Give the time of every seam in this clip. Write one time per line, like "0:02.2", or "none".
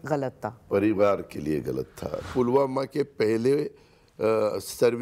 0:02.3